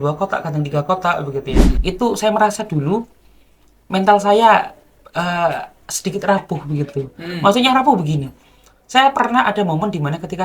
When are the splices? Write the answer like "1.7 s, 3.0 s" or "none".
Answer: 1.7 s